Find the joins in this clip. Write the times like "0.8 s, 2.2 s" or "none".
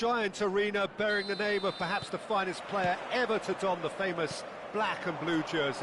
none